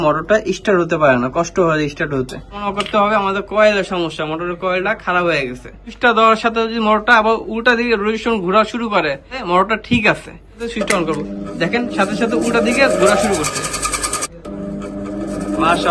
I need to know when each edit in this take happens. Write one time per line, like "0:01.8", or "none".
0:02.6
0:05.9
0:09.4
0:10.6
0:14.3